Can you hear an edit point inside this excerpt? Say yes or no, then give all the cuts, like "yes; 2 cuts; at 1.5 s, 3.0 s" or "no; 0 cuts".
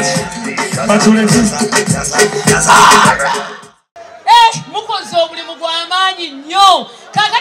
yes; 1 cut; at 3.4 s